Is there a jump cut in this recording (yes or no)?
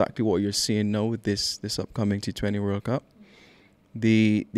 no